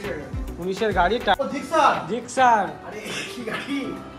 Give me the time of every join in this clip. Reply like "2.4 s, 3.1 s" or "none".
1.4 s